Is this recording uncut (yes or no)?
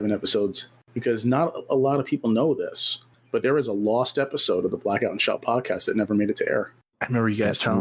yes